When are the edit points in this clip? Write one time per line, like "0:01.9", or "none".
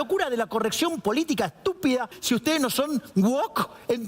0:02.2